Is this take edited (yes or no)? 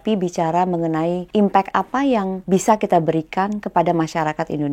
yes